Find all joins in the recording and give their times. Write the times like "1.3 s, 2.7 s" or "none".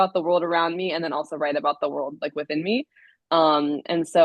none

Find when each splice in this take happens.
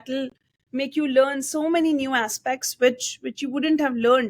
none

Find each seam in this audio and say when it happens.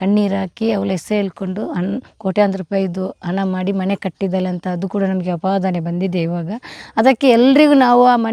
none

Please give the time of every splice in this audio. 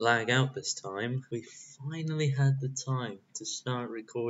1.2 s

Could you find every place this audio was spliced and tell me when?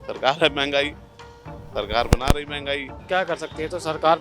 2.9 s

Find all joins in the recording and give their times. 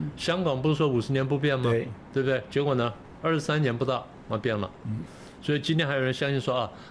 none

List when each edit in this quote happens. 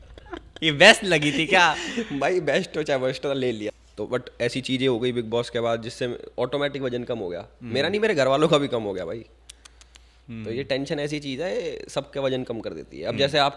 3.7 s

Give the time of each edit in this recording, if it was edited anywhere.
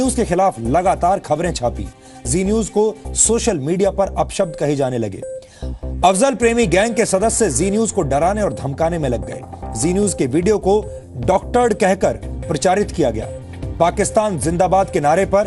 7.7 s

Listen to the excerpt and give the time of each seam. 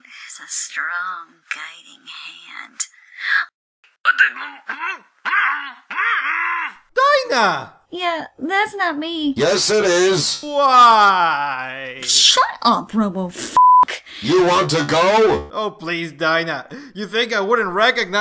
none

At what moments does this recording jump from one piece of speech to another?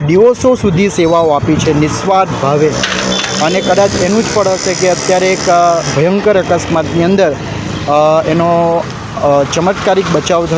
none

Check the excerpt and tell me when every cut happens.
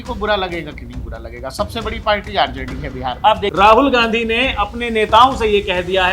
3.5 s

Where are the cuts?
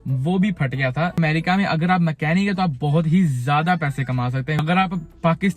1.2 s, 4.6 s

